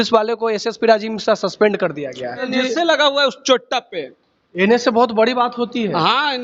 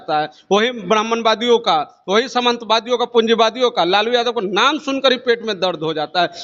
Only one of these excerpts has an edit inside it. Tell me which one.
first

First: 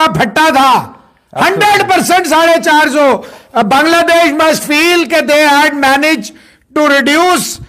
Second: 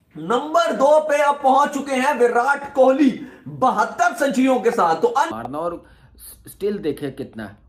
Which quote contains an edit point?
second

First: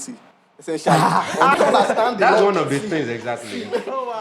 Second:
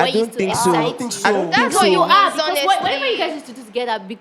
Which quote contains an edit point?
first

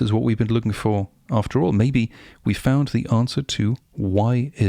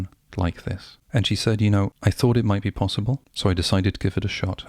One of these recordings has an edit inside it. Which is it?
second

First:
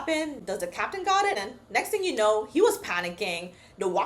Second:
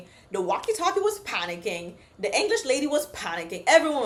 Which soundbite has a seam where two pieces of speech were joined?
first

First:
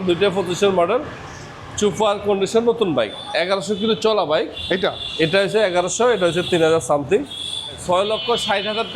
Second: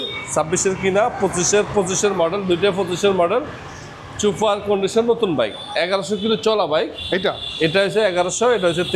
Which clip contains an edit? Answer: first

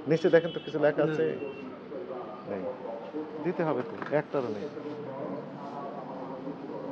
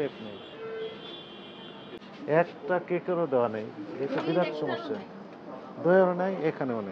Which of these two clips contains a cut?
second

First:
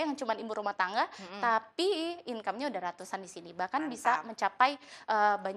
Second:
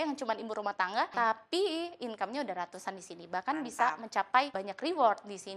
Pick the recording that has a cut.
second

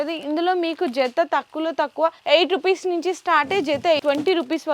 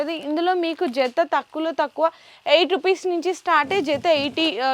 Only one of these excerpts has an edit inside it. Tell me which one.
first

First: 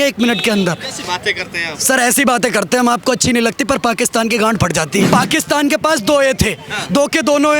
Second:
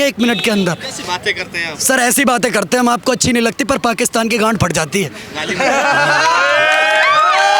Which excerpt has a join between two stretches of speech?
first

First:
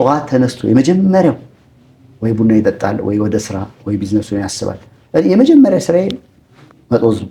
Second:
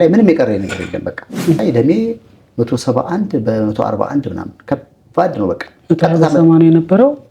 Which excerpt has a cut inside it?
second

